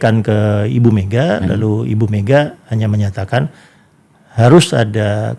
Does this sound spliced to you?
no; 0 cuts

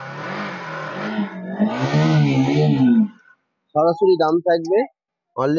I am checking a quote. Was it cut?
no; 0 cuts

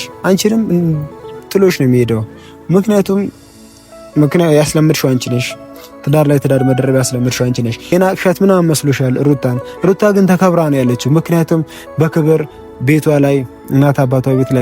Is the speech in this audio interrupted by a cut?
yes; 1 cut; at 7.9 s

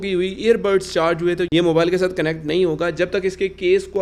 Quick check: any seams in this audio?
no; 0 cuts

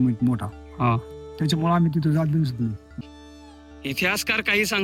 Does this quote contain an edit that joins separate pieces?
yes; 1 cut; at 3.0 s

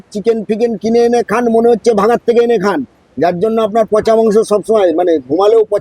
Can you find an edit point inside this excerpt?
yes; 1 cut; at 2.0 s

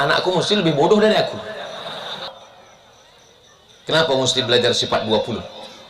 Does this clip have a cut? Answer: yes; 1 cut; at 2.3 s

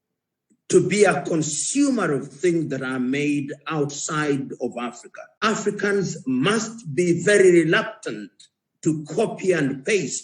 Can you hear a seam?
yes; 1 cut; at 5.3 s

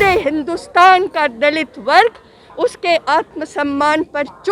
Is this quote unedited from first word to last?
yes; 0 cuts

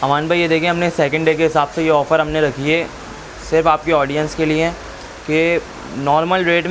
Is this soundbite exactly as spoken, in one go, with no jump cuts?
yes; 0 cuts

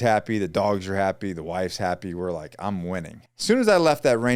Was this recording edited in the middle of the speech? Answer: yes; 1 cut; at 3.3 s

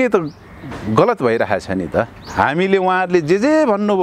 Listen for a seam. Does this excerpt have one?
yes; 1 cut; at 2.2 s

